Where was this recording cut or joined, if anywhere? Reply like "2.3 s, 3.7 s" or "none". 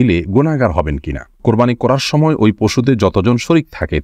1.4 s

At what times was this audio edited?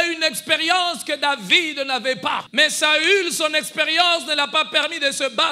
2.4 s

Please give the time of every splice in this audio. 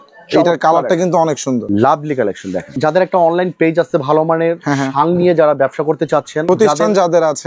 1.7 s, 2.8 s, 6.4 s

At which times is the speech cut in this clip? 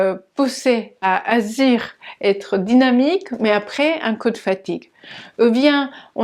none

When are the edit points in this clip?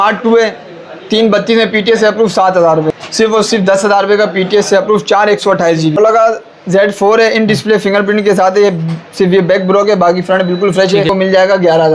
2.9 s, 6.0 s, 11.1 s

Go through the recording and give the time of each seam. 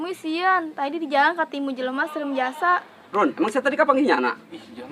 3.0 s

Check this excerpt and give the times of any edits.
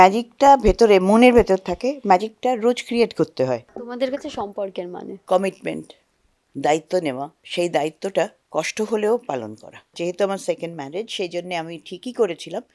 3.8 s, 5.1 s, 7.4 s, 10.0 s

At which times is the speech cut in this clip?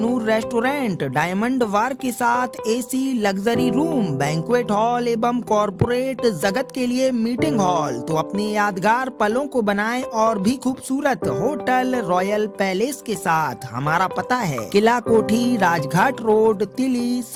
none

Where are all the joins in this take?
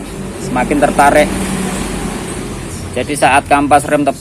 none

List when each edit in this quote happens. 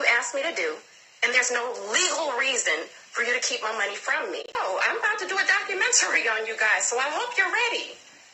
4.5 s

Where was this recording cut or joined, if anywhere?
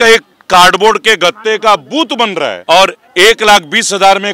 2.6 s

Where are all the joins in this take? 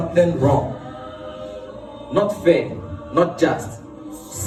none

